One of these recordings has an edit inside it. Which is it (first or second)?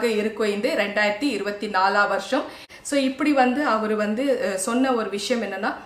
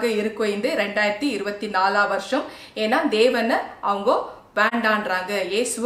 first